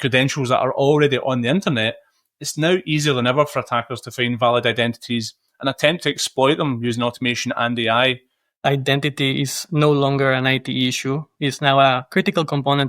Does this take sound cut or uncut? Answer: cut